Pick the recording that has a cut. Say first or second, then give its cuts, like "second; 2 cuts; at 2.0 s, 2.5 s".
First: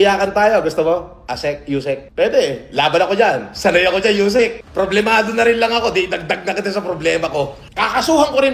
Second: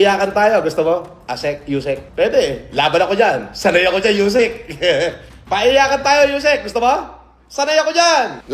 first; 2 cuts; at 4.6 s, 7.7 s